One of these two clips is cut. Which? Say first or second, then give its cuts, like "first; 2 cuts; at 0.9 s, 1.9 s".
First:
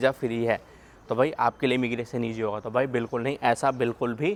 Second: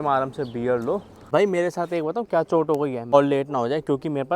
second; 2 cuts; at 1.3 s, 3.1 s